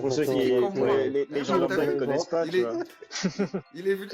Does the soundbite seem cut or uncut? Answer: uncut